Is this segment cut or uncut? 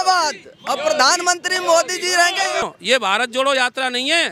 cut